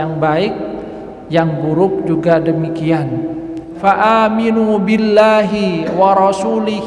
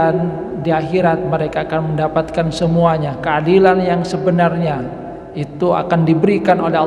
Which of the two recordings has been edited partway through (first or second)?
first